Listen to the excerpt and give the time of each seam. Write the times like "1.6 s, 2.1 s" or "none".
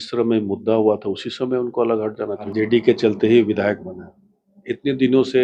2.5 s